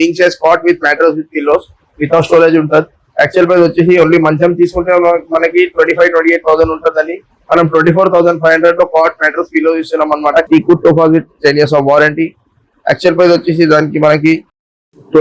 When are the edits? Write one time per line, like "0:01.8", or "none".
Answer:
0:10.5